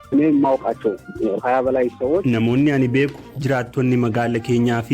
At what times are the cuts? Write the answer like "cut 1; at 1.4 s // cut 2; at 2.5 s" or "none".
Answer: cut 1; at 1.1 s